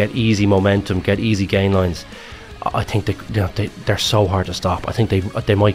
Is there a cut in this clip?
no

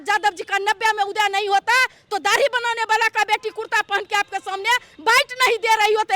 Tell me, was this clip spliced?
no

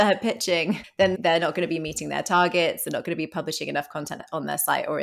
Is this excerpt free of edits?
no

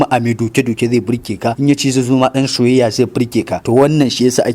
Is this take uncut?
no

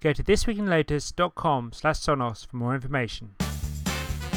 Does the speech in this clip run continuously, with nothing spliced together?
no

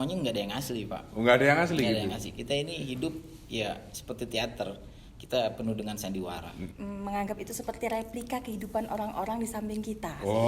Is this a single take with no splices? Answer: no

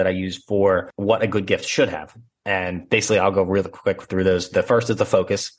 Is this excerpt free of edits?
no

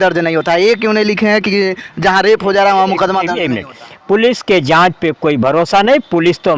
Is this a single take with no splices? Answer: no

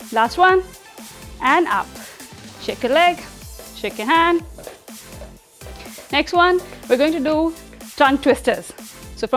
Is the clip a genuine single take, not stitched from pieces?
yes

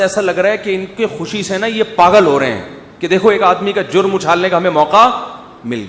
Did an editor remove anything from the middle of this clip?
no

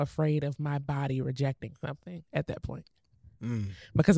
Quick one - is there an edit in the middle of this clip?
no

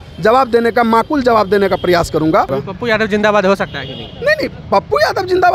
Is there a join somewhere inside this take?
yes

